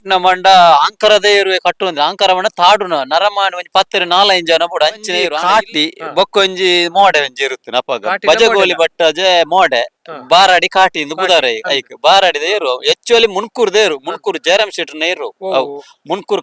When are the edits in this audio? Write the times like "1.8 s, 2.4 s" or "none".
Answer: 5.2 s